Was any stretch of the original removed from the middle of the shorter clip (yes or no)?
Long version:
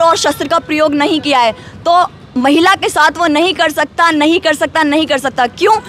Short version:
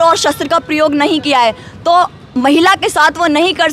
no